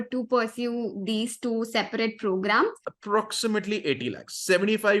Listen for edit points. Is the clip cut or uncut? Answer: cut